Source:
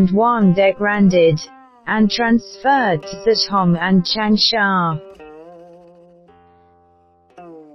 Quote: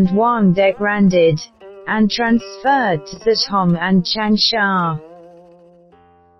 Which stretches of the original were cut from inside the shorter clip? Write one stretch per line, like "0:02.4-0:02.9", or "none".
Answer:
0:05.0-0:05.3